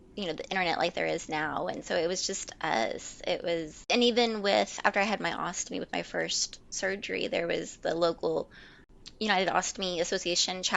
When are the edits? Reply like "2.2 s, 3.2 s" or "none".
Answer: none